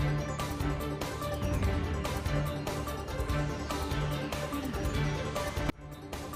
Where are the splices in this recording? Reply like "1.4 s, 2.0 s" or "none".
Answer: none